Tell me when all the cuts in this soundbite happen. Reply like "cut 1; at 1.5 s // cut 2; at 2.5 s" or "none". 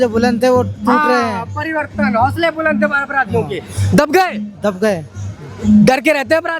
none

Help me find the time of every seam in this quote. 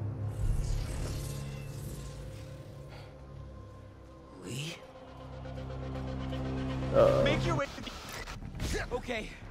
cut 1; at 7.5 s

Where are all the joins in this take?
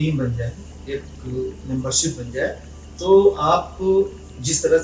none

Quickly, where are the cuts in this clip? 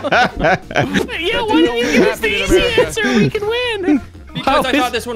cut 1; at 1.0 s

